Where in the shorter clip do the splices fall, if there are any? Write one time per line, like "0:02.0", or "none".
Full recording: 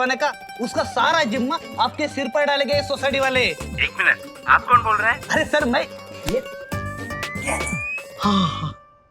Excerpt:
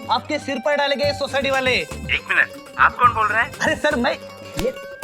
none